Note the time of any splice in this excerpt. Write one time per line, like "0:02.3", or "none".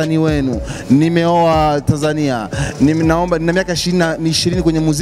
none